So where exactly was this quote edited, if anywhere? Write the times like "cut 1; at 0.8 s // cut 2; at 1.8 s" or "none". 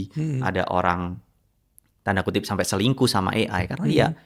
none